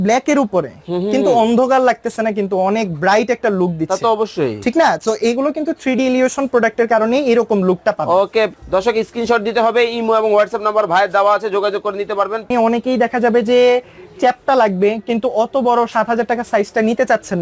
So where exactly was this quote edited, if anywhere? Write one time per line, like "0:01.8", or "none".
0:08.5
0:12.5